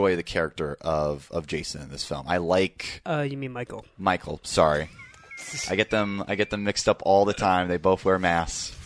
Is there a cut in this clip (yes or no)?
no